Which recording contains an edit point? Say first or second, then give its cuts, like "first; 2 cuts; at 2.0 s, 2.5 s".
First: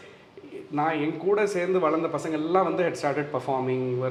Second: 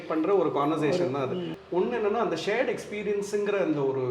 second; 1 cut; at 1.5 s